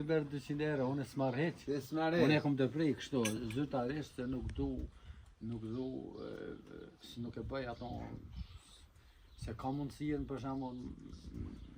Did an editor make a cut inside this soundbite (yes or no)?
no